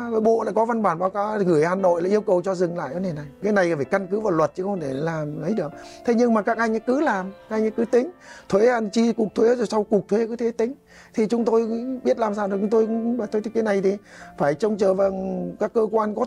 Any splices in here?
no; 0 cuts

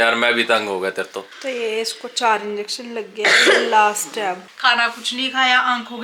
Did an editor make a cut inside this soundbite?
yes; 2 cuts; at 1.3 s, 4.4 s

